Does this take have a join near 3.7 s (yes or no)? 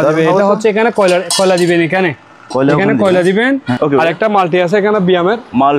yes